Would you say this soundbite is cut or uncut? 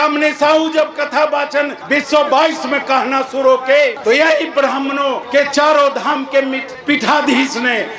uncut